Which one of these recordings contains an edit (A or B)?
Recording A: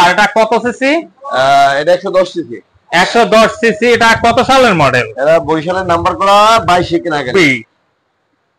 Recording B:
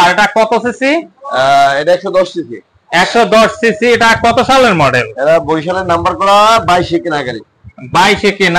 A